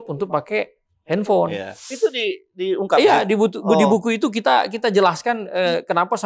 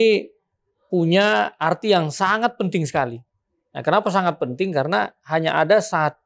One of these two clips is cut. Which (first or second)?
first